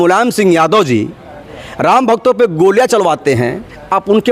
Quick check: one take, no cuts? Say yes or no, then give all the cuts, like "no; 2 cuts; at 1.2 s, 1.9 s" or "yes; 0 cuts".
yes; 0 cuts